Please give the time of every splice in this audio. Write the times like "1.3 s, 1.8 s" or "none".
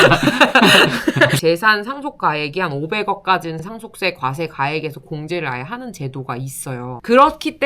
1.4 s